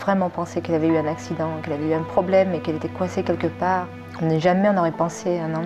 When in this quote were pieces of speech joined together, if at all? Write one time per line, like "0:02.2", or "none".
0:04.0